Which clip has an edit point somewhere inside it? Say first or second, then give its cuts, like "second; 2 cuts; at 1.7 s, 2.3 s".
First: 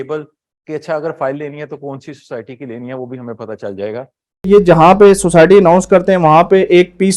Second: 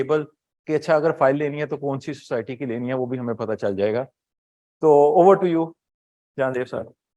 first; 1 cut; at 4.5 s